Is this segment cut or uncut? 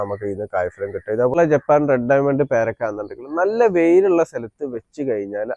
cut